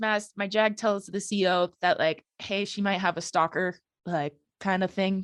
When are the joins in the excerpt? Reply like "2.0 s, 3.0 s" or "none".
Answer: none